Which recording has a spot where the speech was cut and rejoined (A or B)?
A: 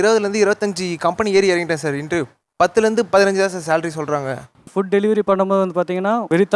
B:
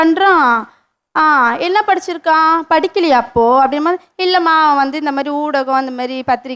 A